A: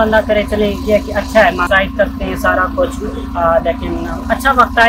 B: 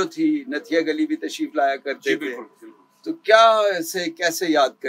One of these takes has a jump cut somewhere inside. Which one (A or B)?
A